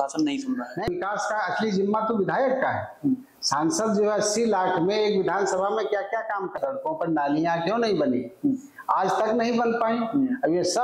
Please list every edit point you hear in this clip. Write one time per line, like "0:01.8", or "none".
0:00.8
0:06.5